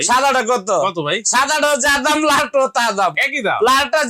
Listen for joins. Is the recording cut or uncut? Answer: uncut